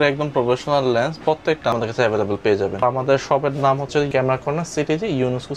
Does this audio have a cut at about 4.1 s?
yes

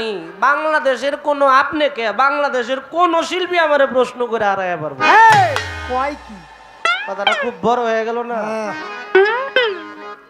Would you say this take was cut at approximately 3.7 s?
no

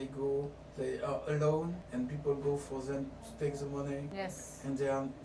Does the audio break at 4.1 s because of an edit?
yes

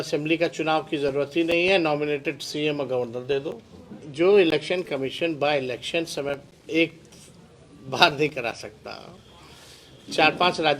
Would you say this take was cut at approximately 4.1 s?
yes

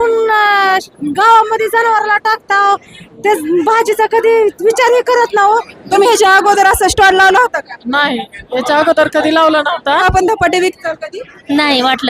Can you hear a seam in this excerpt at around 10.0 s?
yes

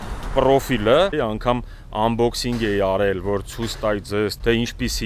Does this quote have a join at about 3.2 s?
no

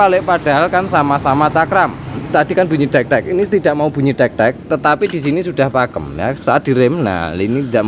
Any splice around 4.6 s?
no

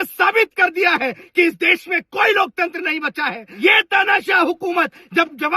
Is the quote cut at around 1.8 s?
no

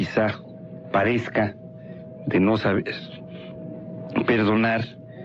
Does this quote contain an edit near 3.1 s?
no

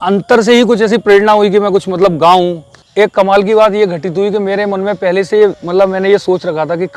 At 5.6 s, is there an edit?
no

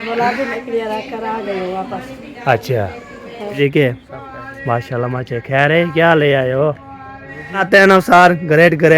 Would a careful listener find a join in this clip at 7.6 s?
yes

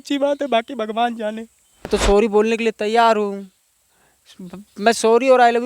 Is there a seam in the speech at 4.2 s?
no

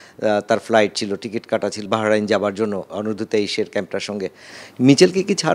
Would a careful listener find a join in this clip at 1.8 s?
yes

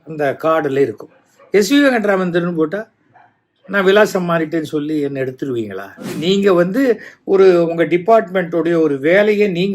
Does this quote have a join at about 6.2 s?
yes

